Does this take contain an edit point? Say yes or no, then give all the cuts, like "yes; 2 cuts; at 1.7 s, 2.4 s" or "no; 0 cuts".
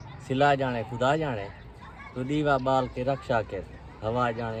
no; 0 cuts